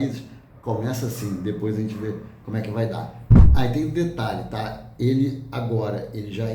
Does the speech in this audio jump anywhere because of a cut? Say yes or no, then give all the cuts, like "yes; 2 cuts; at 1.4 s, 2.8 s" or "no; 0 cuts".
yes; 1 cut; at 3.3 s